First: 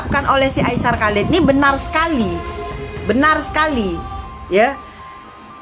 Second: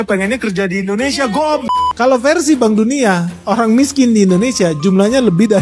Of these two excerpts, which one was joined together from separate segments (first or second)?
second